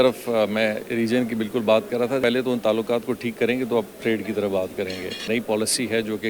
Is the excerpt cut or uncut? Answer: cut